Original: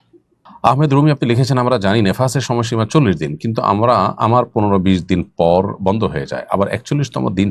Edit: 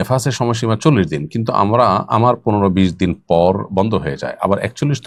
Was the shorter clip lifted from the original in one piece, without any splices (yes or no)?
yes